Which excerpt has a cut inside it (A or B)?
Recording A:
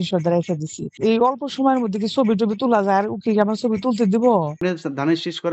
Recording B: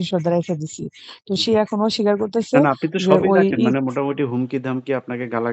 A